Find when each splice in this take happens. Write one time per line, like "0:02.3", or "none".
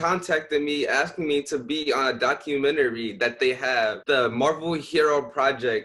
none

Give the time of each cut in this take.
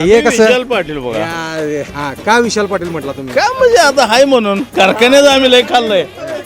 0:01.9

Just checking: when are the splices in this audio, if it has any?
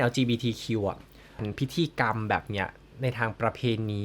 0:01.4

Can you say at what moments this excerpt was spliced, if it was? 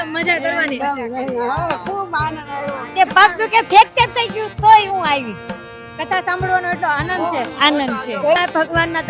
0:02.9
0:08.4

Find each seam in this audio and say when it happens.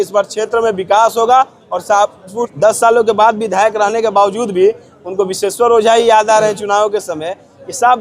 0:02.5

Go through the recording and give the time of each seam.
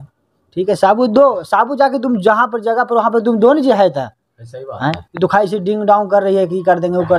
none

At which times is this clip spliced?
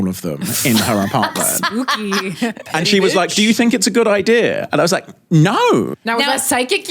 0:05.9

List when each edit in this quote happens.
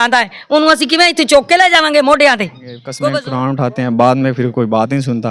0:02.8

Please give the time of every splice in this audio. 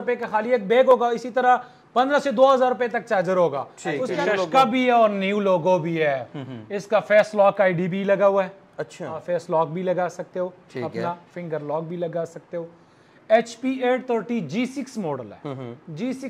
0:04.1

